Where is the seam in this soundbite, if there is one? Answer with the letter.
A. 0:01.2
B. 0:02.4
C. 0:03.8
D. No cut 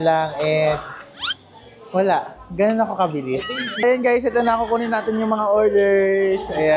C